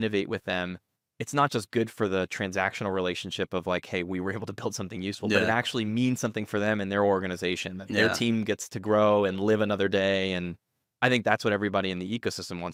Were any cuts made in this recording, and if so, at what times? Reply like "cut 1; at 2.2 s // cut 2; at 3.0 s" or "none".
none